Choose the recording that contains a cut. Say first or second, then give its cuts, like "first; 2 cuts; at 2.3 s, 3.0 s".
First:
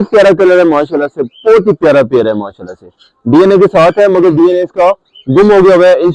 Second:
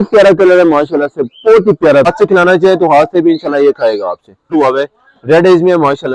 second; 2 cuts; at 2.1 s, 4.5 s